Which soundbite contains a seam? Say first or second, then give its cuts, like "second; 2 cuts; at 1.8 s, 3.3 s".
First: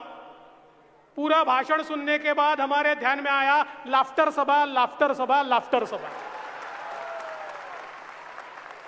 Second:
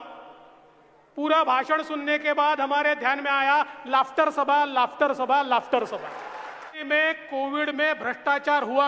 second; 1 cut; at 6.8 s